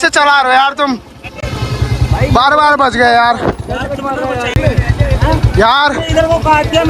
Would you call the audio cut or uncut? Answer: cut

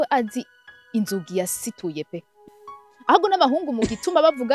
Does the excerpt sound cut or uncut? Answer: cut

